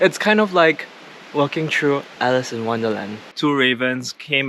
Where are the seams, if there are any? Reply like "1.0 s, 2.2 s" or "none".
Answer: 3.2 s